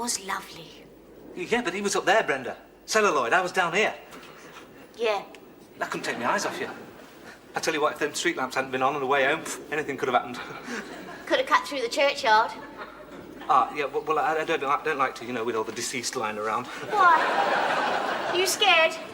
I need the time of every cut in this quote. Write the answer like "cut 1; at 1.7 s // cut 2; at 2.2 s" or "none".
none

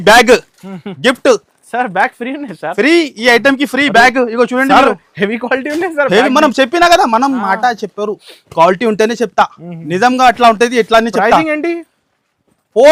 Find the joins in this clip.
none

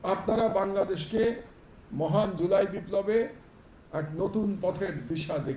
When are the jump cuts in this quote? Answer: none

